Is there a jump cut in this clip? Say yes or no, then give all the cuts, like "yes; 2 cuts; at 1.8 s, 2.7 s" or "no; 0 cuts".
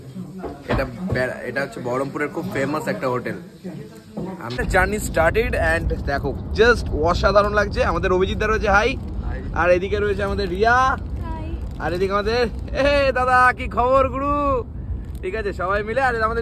yes; 1 cut; at 4.6 s